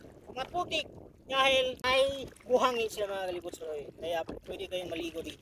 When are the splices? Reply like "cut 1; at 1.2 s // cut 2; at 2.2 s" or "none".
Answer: cut 1; at 1.8 s